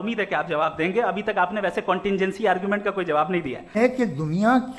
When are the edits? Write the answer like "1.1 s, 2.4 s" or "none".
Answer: 3.8 s